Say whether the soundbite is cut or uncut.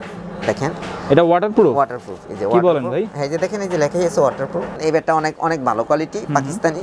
cut